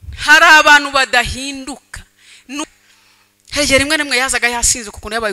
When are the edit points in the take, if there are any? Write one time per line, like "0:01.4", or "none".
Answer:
0:02.6